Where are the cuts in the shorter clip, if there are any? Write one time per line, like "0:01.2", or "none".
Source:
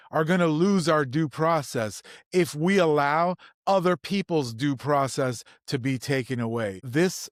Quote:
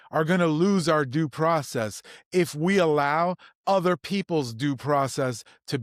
none